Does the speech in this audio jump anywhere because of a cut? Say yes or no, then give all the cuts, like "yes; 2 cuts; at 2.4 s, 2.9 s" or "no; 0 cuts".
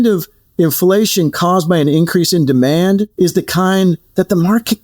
no; 0 cuts